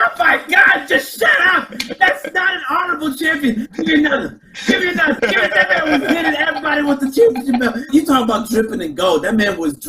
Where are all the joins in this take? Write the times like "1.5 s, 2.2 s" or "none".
3.7 s, 5.2 s, 7.9 s